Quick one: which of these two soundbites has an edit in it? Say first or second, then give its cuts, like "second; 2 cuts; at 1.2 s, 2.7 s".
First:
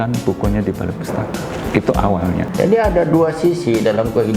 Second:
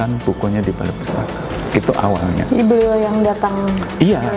first; 1 cut; at 2.4 s